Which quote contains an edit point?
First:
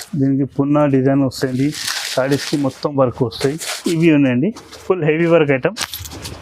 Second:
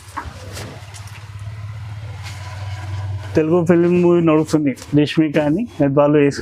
first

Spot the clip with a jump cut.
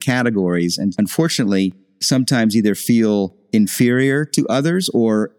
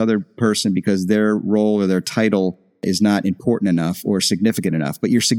first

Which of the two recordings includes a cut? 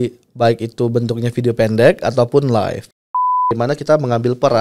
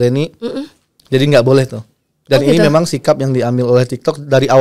first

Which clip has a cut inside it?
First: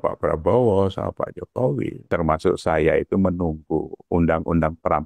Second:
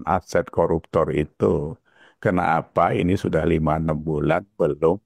first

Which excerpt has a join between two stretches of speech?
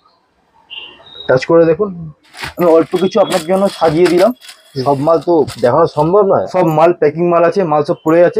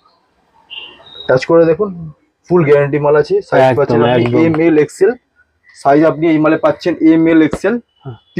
first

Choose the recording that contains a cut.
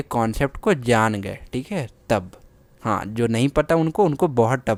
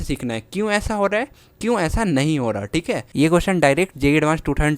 second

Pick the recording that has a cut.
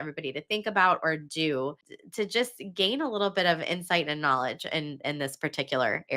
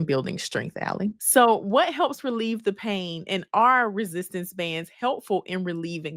second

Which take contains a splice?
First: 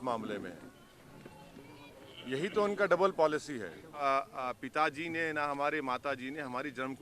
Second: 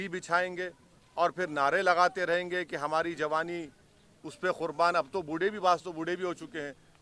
first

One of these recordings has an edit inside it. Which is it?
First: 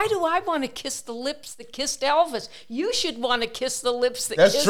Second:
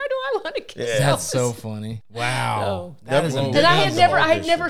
second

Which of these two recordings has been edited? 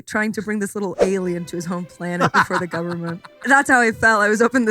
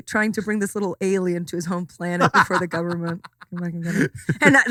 first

